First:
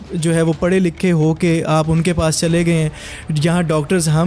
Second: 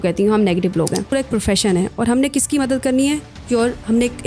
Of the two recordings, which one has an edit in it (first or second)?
second